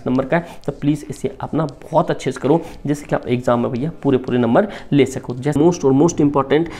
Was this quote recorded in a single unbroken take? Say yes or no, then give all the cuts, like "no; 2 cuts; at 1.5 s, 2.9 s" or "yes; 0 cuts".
no; 1 cut; at 5.5 s